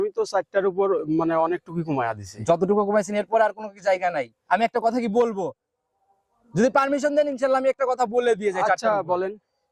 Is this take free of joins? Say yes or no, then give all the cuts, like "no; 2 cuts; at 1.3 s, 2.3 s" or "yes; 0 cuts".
yes; 0 cuts